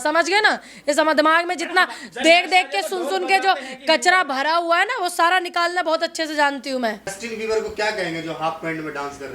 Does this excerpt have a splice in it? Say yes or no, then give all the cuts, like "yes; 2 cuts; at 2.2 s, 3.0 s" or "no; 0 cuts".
yes; 1 cut; at 7.2 s